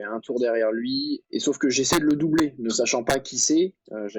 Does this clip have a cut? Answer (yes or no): yes